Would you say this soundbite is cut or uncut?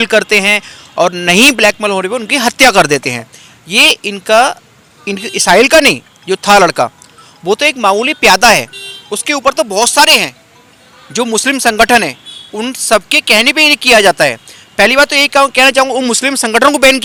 uncut